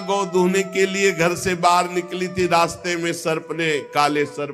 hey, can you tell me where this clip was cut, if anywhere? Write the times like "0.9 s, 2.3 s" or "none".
none